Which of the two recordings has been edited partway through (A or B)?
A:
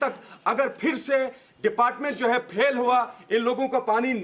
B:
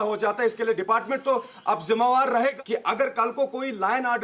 B